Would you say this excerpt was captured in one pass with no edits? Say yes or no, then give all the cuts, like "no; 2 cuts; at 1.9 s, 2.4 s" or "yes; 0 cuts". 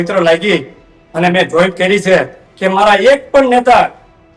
no; 1 cut; at 2.4 s